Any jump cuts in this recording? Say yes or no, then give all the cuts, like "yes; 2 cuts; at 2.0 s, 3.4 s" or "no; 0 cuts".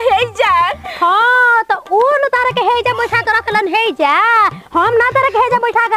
no; 0 cuts